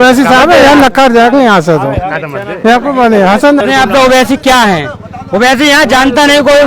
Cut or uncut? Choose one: cut